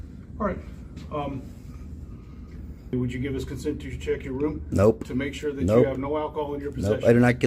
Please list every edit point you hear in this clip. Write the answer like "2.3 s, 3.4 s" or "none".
2.9 s